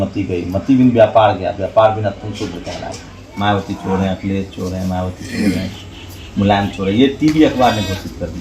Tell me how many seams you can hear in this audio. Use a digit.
1